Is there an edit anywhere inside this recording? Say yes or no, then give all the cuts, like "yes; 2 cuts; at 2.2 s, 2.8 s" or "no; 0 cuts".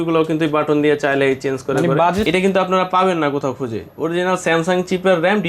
yes; 1 cut; at 2.3 s